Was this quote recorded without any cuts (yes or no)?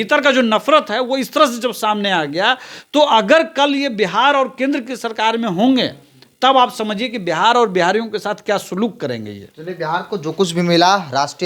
yes